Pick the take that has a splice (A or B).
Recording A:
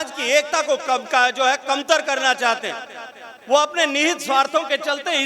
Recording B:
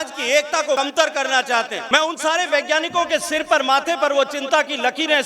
B